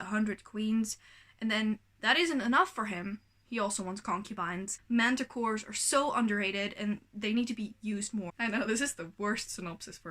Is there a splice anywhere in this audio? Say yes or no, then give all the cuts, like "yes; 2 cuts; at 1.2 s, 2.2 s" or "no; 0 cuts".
yes; 2 cuts; at 4.7 s, 8.3 s